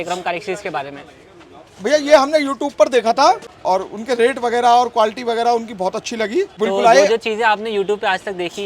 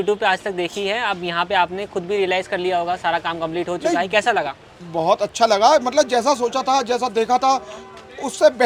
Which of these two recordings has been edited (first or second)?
first